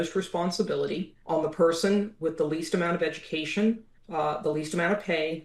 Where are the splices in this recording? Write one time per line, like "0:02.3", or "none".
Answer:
0:01.1
0:03.9

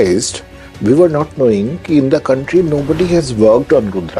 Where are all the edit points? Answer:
none

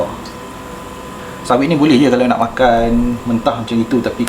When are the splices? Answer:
0:01.2

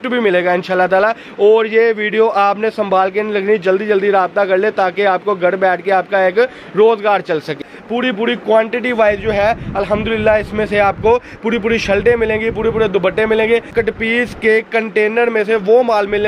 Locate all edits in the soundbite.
0:07.7
0:13.7

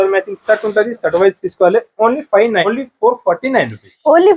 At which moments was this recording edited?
0:02.7

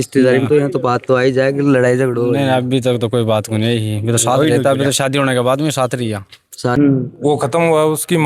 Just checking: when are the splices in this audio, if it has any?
0:06.7

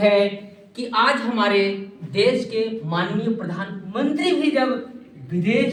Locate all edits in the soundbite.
none

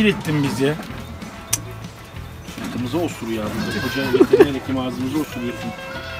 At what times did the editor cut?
none

